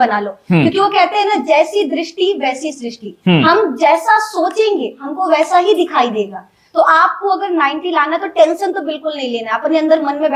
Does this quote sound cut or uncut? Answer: uncut